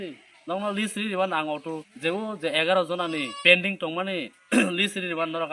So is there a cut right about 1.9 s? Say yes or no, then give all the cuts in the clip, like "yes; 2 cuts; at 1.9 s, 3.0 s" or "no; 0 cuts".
yes; 2 cuts; at 1.9 s, 3.3 s